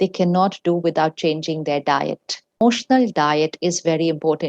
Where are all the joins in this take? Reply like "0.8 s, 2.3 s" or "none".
2.6 s

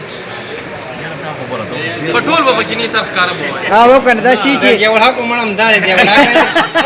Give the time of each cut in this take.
none

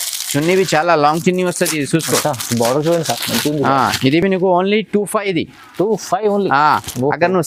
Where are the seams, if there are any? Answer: none

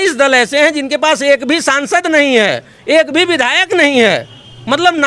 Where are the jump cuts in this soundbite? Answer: none

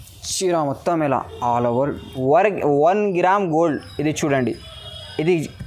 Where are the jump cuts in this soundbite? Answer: 2.0 s

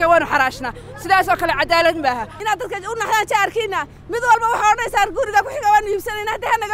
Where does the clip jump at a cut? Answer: 2.3 s

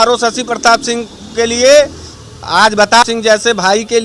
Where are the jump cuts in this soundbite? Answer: 3.0 s

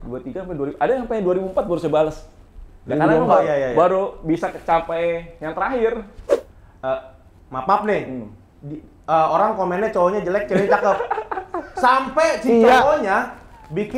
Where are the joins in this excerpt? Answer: 6.2 s

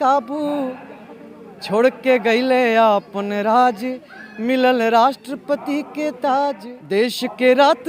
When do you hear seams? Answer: 6.7 s

